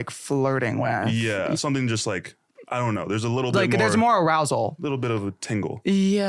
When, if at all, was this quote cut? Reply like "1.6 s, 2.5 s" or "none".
1.5 s, 4.8 s